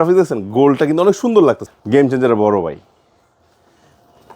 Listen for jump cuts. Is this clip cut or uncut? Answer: cut